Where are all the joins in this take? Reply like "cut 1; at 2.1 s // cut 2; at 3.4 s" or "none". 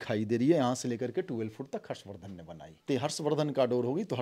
cut 1; at 2.7 s